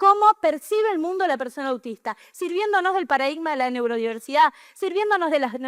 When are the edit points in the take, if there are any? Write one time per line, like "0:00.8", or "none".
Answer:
none